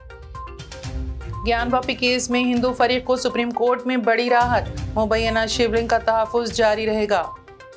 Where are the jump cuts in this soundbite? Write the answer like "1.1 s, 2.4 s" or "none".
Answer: none